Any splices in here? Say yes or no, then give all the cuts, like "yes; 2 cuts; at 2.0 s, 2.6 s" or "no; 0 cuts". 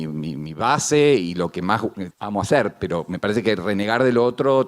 yes; 1 cut; at 2.1 s